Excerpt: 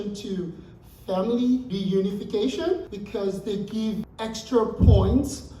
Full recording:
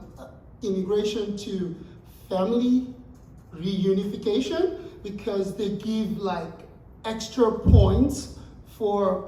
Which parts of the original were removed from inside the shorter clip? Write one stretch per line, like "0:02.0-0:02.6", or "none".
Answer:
0:02.9-0:03.6
0:04.9-0:05.1
0:06.2-0:06.9

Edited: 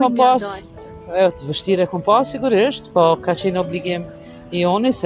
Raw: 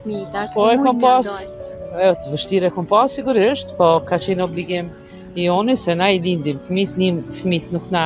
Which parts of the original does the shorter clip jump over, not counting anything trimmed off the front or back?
none

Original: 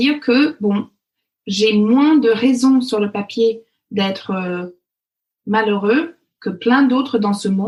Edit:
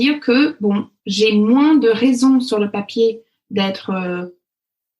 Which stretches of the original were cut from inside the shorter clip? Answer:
0:01.0-0:01.4

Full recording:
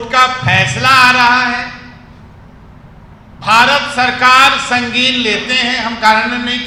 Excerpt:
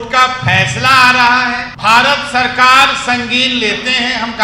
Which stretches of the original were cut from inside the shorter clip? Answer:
0:01.7-0:03.3

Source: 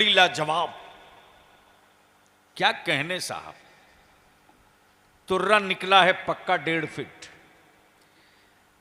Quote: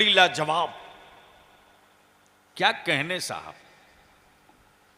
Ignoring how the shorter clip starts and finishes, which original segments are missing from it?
none

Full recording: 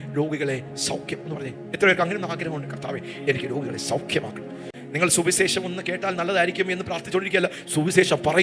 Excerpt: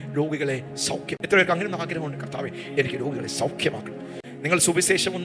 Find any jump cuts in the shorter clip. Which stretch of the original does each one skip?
0:01.1-0:01.6

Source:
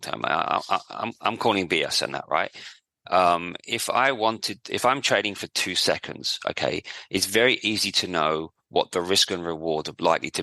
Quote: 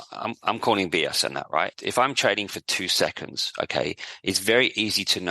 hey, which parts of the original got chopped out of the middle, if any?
0:02.6-0:04.7

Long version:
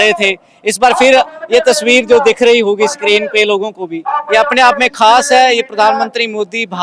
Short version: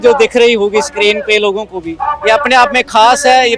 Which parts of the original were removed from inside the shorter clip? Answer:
none

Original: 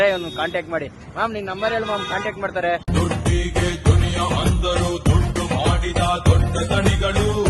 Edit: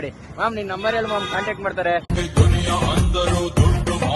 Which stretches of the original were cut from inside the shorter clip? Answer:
0:02.9-0:03.6

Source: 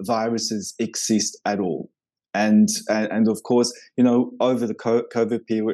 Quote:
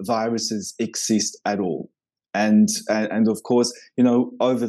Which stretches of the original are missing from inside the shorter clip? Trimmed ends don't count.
none

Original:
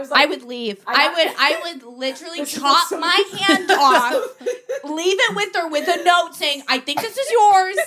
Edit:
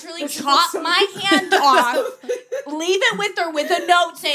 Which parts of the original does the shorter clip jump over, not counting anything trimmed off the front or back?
none

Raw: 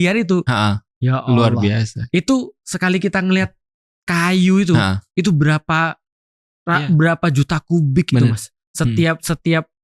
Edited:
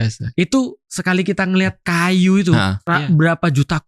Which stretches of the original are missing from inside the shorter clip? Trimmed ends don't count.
0:03.6-0:04.0
0:05.0-0:06.6

